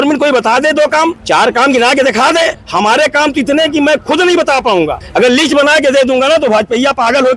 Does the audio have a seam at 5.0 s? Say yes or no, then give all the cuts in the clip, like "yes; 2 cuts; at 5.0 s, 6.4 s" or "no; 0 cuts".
yes; 3 cuts; at 1.2 s, 2.6 s, 5.0 s